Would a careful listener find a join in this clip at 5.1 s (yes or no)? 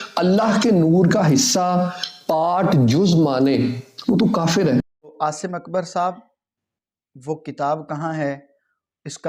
yes